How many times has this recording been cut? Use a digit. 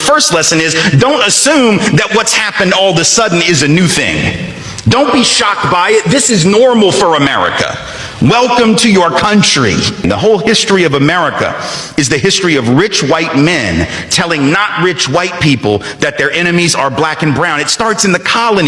1